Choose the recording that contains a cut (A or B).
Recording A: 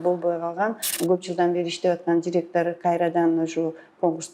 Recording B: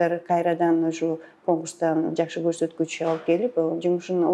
A